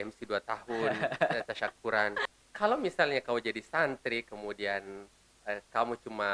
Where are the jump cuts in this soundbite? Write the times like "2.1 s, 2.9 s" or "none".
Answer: 2.2 s